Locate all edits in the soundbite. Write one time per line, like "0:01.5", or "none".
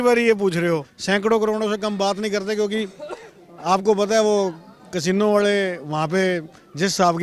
0:00.9